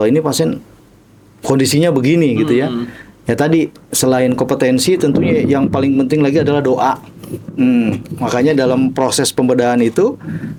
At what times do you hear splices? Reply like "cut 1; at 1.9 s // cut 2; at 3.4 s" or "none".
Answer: none